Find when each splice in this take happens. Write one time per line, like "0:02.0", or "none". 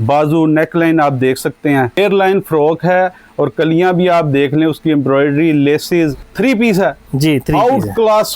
0:02.0
0:06.3